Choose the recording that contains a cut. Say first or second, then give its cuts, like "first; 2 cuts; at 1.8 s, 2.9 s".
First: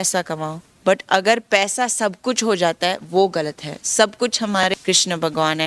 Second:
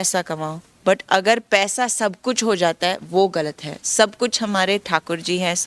first; 1 cut; at 4.6 s